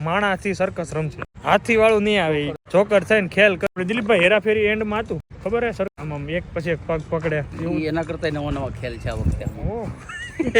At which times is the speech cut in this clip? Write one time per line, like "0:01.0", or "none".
0:01.2
0:02.6
0:03.7
0:05.3
0:05.9